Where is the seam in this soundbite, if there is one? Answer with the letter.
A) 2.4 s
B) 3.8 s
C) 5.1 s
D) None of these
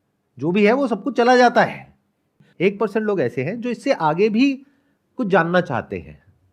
A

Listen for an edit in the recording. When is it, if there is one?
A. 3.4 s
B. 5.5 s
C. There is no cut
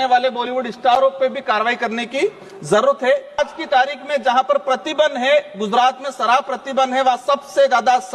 A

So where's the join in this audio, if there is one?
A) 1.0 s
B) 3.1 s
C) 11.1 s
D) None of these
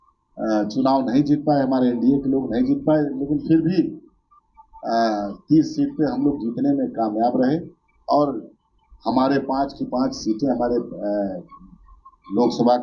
D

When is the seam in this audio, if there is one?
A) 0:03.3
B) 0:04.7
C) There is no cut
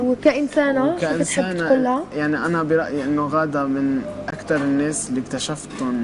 A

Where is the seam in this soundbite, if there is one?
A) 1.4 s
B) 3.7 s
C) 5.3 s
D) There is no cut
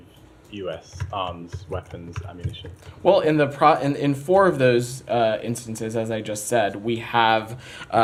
D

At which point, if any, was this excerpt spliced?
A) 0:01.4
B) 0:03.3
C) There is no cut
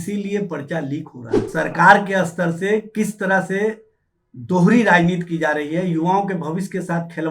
A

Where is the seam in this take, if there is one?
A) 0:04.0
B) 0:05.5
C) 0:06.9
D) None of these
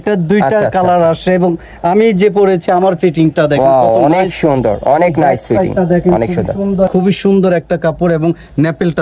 C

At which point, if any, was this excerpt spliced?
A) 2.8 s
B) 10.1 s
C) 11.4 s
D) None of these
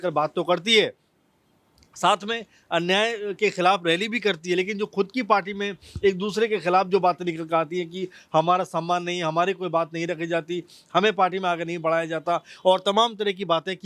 D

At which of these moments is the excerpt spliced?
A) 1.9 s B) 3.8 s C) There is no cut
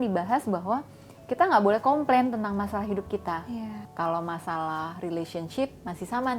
B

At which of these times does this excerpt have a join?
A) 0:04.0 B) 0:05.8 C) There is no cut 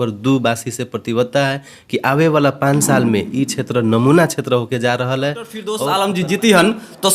B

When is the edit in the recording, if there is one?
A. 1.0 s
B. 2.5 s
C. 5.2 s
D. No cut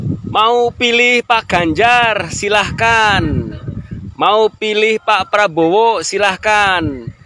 D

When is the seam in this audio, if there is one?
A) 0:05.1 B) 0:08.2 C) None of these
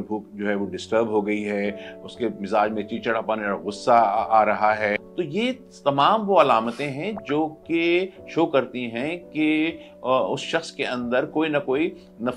A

